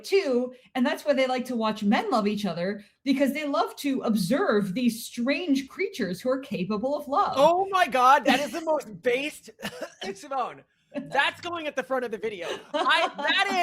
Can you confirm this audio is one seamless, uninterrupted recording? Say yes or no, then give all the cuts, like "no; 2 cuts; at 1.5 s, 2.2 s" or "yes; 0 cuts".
yes; 0 cuts